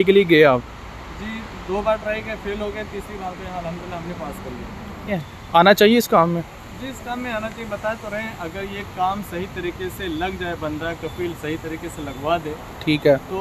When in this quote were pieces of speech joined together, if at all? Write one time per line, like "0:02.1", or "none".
0:05.2